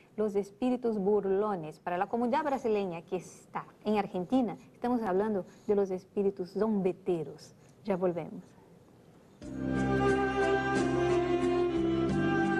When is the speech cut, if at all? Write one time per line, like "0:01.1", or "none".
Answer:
0:01.3

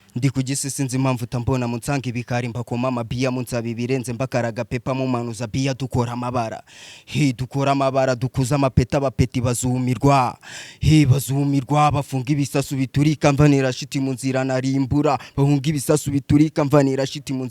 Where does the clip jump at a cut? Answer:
none

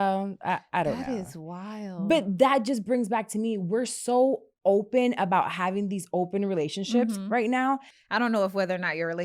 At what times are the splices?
0:08.0

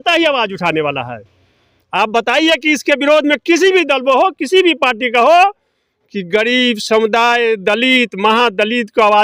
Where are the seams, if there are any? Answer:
none

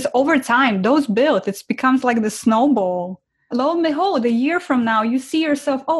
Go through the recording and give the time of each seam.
none

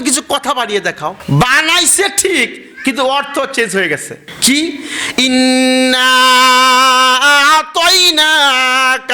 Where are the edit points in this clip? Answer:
0:01.2

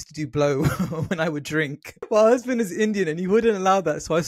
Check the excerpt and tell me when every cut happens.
0:02.1

